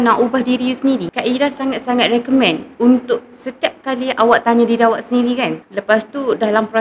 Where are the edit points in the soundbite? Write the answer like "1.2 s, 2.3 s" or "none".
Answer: 5.6 s